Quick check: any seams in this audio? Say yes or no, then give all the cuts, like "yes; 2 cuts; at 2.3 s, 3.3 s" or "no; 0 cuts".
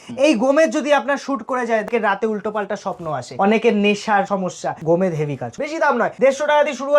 yes; 4 cuts; at 1.8 s, 3.3 s, 4.4 s, 5.8 s